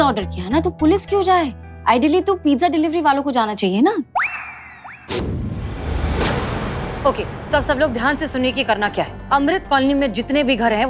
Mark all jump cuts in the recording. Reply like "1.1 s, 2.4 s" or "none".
5.2 s